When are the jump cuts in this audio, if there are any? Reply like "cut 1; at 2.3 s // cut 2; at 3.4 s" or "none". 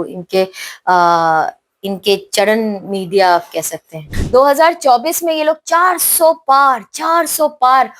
cut 1; at 4.1 s